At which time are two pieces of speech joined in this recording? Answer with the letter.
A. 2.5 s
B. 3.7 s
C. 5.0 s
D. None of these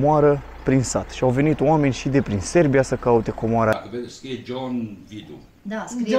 B